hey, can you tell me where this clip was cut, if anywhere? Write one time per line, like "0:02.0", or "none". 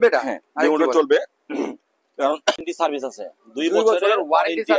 0:02.6